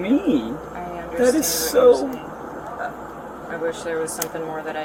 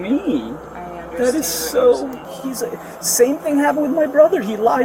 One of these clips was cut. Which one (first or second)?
second